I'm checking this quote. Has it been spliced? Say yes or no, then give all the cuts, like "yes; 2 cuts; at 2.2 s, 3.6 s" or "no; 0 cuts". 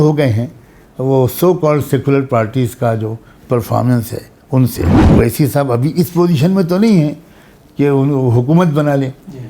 yes; 1 cut; at 5.0 s